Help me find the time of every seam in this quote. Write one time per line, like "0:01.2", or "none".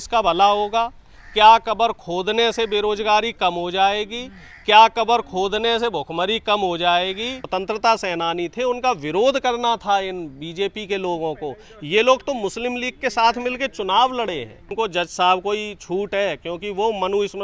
0:07.5
0:14.7